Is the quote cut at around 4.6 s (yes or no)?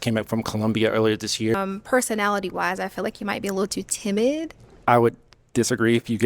yes